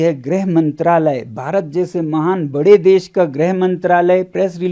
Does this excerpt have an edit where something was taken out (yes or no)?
no